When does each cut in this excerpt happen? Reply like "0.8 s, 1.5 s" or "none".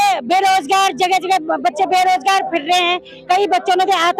none